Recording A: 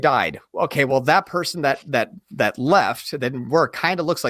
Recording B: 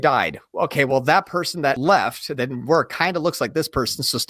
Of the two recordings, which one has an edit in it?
B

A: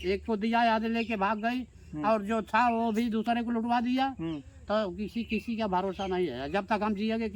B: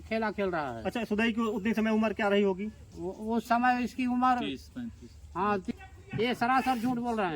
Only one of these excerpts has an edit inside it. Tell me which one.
B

